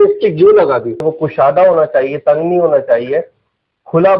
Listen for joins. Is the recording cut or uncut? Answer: cut